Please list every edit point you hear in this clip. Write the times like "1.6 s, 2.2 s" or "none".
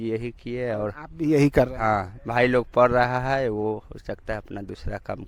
none

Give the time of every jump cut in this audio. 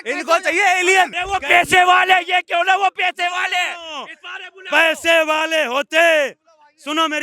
1.2 s

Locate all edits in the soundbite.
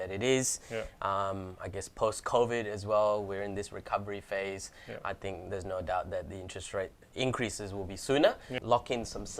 7.1 s, 8.5 s

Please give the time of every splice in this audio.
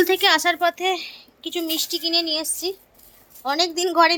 none

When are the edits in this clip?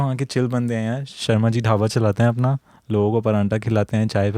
none

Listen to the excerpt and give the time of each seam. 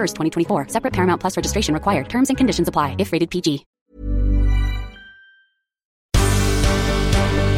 3.7 s, 5.9 s

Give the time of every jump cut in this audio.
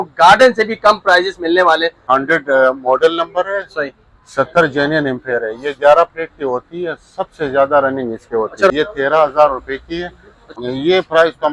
2.0 s, 8.7 s, 10.4 s

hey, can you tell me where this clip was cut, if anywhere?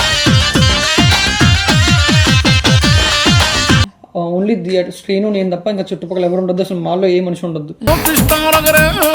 3.8 s

